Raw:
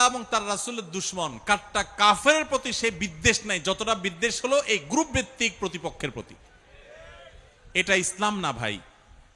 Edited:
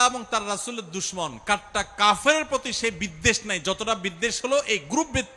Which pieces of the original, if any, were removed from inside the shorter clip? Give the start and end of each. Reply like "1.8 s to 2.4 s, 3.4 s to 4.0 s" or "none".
none

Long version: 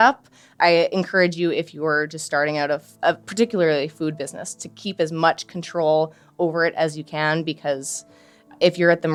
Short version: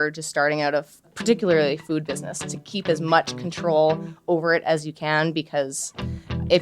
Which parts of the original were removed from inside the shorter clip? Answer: 3.0 s to 3.2 s

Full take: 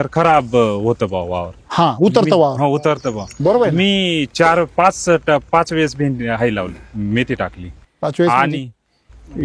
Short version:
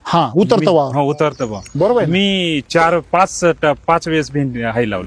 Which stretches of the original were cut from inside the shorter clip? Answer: none

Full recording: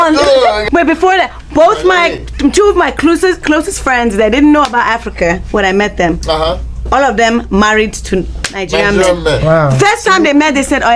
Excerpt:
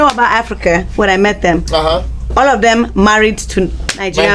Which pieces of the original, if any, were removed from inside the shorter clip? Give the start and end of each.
none

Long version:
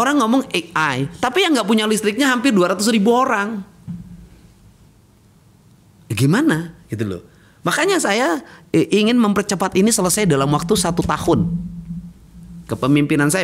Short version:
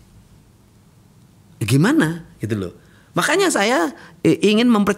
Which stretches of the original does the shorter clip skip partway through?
none

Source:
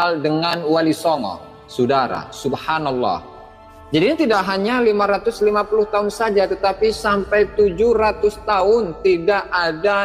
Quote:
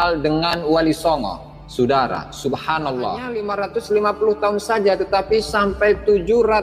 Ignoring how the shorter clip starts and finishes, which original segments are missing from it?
3.5 s to 5.0 s

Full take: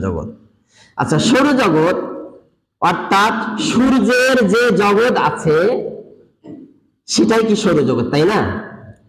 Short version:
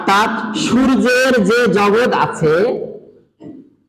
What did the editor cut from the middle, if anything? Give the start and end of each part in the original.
none

